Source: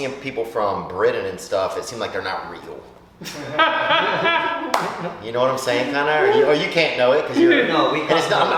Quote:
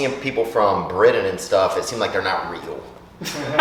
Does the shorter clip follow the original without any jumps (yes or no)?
yes